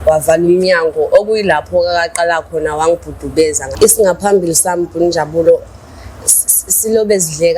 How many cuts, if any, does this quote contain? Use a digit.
1